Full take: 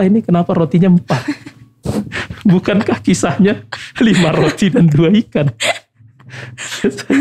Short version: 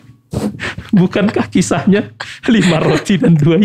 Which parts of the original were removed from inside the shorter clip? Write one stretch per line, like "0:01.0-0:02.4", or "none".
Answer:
none

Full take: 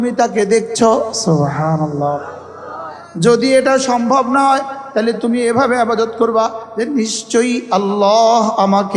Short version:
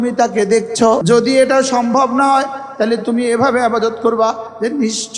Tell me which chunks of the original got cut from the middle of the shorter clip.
0:01.0-0:03.2

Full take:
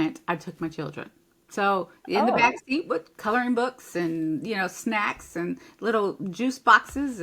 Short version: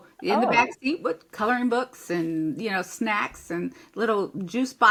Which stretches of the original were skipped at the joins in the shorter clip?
none

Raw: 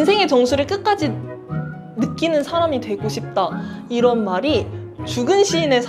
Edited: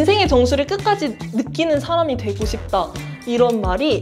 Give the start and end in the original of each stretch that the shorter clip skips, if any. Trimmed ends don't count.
0:01.2-0:01.8

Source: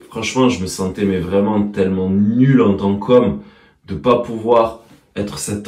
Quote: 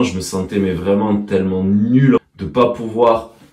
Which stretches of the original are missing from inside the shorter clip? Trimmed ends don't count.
0:02.6-0:03.7

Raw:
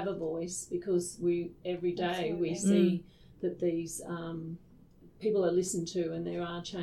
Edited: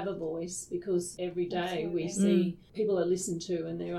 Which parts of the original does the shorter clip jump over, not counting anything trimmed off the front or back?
0:01.1-0:01.6
0:03.1-0:05.1

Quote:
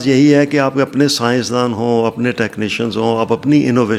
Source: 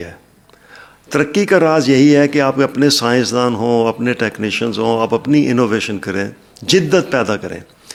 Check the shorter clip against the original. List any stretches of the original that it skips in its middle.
none

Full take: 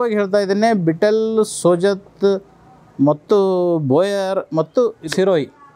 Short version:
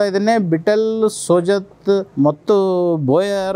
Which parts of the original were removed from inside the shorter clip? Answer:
0:02.4-0:02.9

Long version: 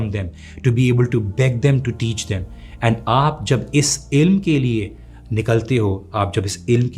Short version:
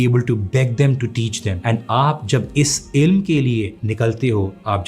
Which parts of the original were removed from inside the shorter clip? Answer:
0:02.3-0:02.6
0:05.0-0:05.3

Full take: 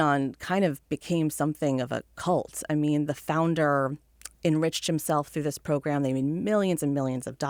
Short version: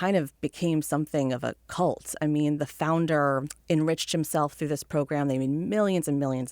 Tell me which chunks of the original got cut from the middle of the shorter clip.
0:04.0-0:04.3

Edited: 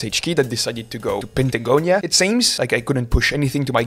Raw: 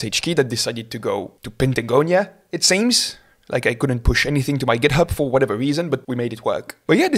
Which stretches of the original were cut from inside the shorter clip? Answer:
0:01.3-0:01.5
0:02.5-0:03.2

